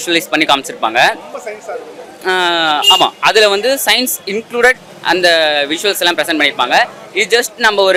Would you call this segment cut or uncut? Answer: uncut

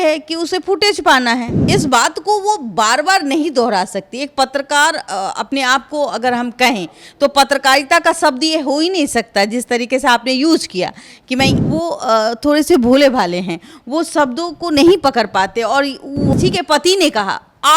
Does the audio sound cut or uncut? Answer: cut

